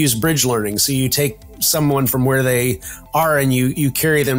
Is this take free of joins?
yes; 0 cuts

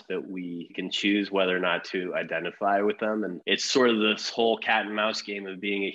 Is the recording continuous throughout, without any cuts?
no; 2 cuts; at 0.8 s, 3.4 s

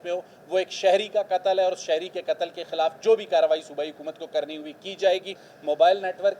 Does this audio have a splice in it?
yes; 1 cut; at 5.4 s

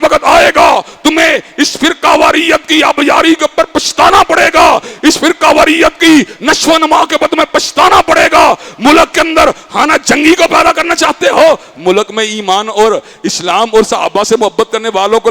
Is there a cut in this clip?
no; 0 cuts

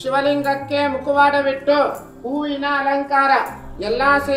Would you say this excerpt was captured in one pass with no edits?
yes; 0 cuts

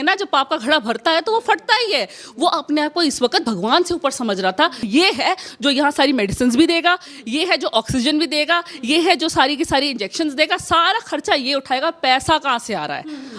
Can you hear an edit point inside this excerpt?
yes; 1 cut; at 4.8 s

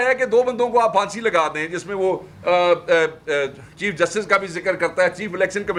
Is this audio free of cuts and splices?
yes; 0 cuts

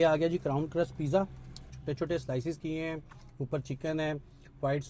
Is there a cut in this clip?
no; 0 cuts

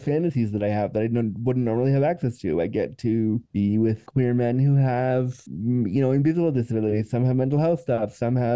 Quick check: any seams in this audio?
no; 0 cuts

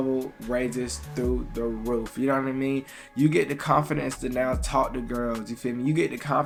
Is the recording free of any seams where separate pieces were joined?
yes; 0 cuts

